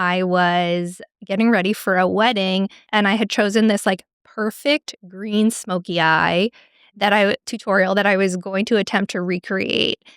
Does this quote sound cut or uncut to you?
cut